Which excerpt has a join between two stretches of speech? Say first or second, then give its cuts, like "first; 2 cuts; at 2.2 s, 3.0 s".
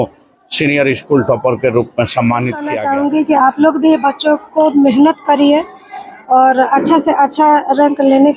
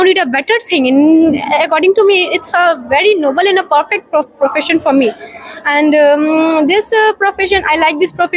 first; 1 cut; at 2.8 s